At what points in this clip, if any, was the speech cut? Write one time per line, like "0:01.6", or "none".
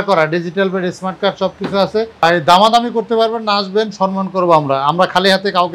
0:02.2